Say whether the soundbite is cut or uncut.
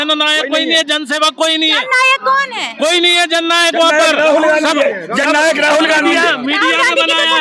uncut